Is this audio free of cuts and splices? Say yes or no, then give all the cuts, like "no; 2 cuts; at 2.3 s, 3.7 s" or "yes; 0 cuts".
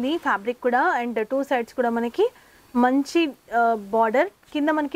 yes; 0 cuts